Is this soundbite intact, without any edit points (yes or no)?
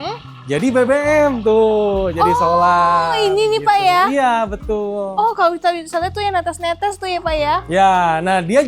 yes